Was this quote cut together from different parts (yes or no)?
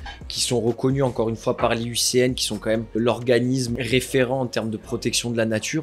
yes